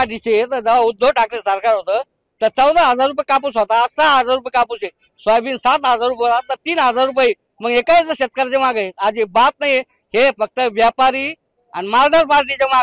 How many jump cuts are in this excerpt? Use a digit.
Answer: 0